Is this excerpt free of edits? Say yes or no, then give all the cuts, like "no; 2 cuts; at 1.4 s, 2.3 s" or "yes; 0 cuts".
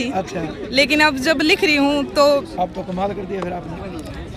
yes; 0 cuts